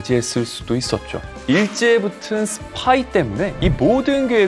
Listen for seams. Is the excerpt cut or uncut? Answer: cut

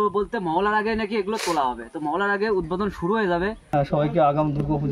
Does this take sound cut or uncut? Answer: cut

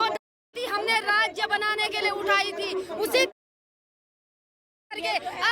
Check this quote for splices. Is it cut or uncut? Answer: uncut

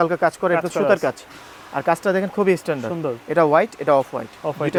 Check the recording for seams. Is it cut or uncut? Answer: uncut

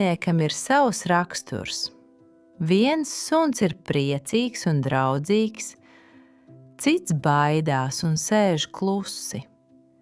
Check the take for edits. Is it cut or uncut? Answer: uncut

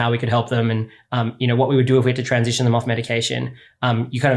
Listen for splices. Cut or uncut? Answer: uncut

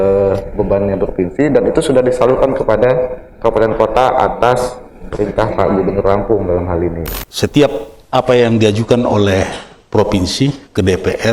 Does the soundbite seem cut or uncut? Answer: cut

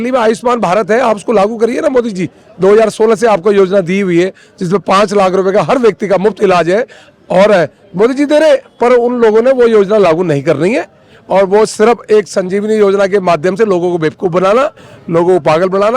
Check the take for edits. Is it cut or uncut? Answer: uncut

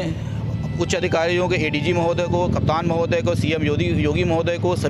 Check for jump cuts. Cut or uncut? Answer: uncut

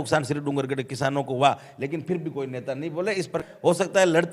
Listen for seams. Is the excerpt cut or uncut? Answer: cut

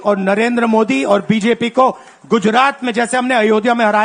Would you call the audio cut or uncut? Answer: uncut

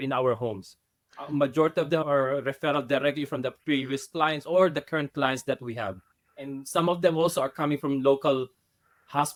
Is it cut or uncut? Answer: uncut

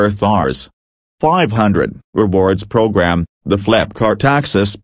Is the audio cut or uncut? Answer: uncut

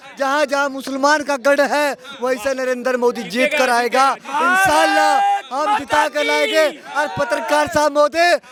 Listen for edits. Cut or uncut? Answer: uncut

